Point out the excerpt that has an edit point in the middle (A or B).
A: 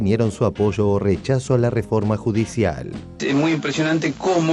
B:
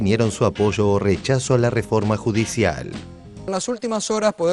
A